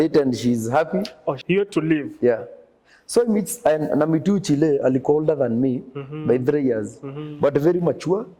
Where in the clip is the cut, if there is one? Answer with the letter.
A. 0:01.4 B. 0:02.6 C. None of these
A